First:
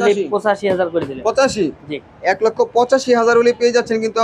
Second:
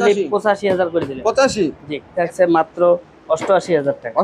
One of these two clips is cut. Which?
second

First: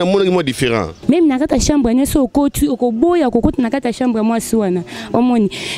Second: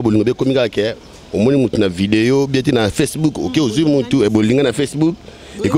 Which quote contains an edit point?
first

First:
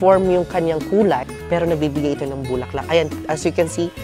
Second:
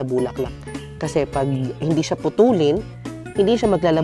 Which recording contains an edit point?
first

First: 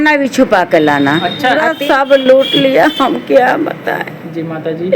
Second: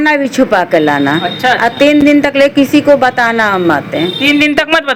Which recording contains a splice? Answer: first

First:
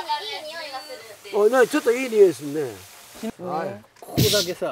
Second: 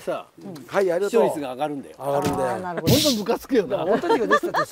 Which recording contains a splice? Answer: first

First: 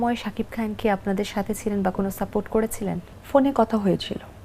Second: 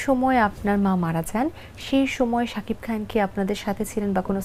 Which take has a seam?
first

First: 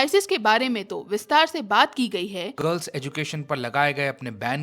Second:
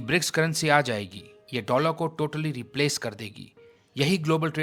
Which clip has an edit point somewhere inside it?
first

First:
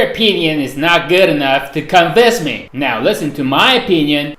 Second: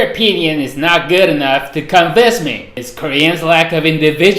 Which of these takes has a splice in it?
second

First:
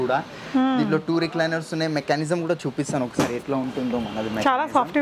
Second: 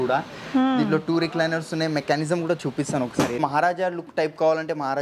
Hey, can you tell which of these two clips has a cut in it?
second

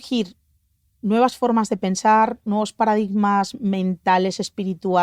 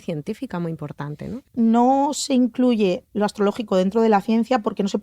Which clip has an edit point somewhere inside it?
second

